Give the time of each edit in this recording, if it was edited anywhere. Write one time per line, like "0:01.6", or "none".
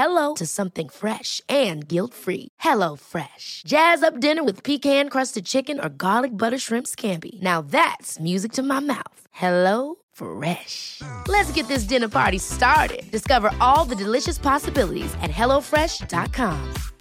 none